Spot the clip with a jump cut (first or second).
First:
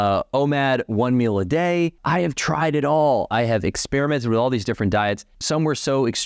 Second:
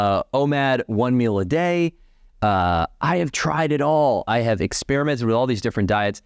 first